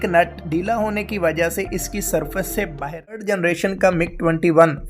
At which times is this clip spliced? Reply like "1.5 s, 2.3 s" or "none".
3.2 s